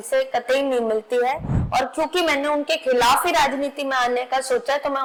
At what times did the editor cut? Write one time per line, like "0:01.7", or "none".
none